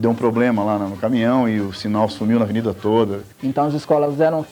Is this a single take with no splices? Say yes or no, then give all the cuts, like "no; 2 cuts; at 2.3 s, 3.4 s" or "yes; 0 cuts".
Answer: no; 1 cut; at 3.3 s